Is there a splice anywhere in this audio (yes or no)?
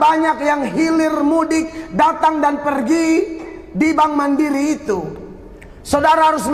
no